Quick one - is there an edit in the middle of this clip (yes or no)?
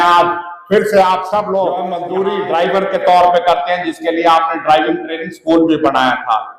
yes